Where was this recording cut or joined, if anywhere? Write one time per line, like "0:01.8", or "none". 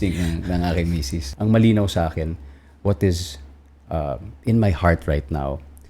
0:01.3